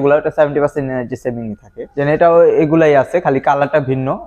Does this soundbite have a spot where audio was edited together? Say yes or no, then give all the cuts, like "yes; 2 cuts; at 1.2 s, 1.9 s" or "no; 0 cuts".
no; 0 cuts